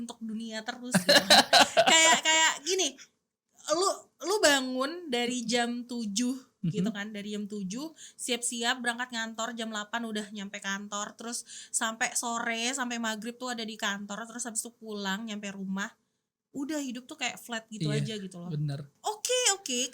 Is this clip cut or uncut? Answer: cut